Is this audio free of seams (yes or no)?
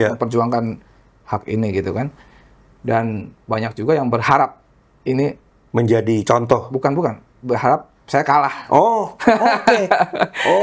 yes